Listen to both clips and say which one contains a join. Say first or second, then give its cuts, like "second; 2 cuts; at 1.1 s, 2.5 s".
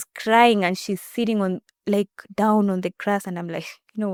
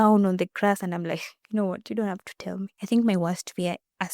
second; 1 cut; at 2.8 s